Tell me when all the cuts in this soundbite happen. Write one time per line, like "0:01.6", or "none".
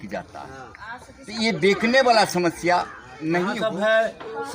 0:03.6